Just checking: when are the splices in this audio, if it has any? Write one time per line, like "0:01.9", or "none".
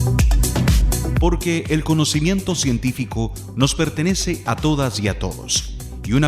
0:01.2

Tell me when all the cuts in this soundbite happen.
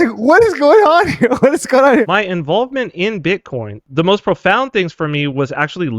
0:02.1
0:03.8

